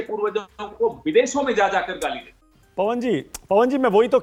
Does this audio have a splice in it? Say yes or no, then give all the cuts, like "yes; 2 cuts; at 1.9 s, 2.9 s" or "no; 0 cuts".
no; 0 cuts